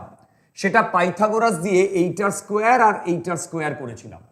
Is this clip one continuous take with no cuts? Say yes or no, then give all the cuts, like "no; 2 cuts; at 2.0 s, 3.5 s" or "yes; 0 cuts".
yes; 0 cuts